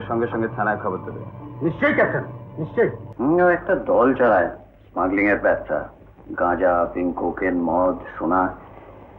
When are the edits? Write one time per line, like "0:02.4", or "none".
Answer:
0:03.0